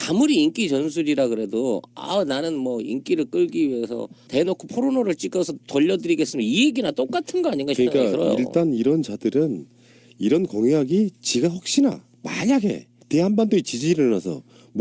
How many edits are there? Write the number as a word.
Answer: one